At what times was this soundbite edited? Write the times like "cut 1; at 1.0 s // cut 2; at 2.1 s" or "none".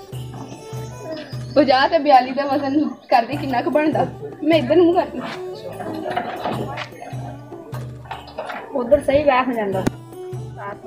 none